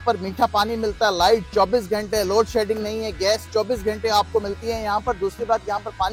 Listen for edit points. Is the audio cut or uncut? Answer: uncut